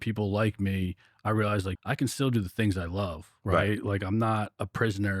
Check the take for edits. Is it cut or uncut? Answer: cut